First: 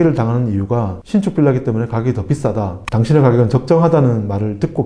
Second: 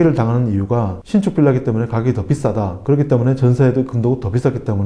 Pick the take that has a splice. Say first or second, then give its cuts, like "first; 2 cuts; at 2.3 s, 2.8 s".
first; 1 cut; at 2.8 s